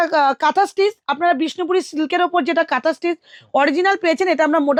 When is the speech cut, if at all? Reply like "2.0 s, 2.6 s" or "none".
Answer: none